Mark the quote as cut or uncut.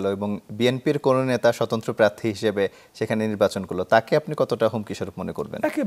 uncut